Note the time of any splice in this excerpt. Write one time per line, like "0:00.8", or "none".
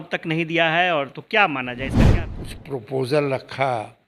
0:02.0